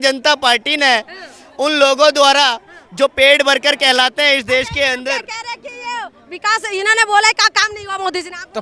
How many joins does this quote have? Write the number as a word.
zero